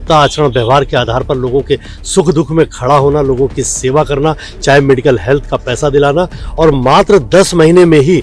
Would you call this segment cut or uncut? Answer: uncut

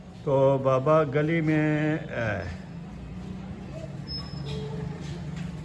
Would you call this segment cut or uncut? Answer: uncut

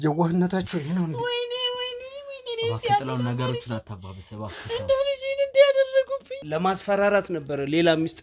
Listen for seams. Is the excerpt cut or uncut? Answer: cut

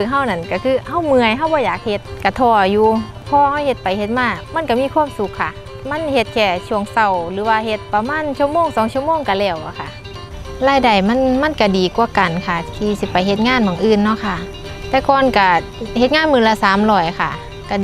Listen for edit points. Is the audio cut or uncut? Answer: cut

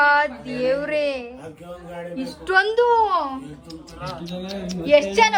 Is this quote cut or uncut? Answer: uncut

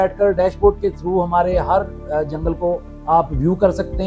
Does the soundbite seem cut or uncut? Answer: uncut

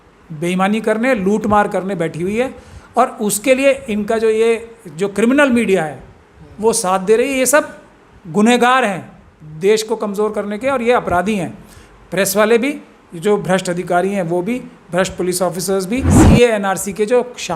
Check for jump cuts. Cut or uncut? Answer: cut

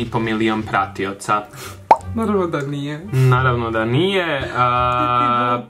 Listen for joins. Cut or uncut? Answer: uncut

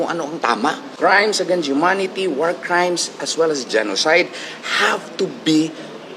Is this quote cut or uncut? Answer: cut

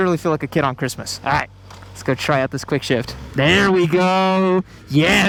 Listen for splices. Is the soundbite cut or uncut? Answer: uncut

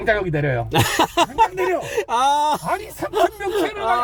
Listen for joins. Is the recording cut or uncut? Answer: uncut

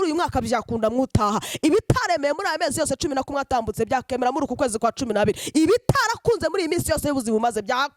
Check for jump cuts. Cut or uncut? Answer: uncut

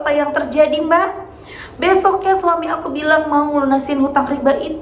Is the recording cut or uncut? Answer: uncut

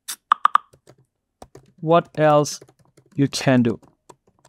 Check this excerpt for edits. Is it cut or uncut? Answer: uncut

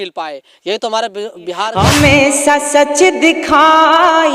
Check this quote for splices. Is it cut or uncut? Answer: cut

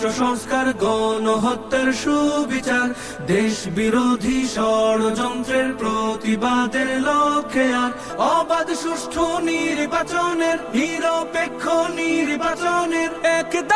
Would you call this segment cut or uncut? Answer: cut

